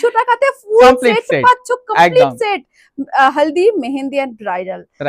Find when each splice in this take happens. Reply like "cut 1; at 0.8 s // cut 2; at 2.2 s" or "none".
none